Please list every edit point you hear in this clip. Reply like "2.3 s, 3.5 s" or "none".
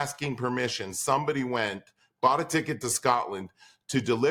none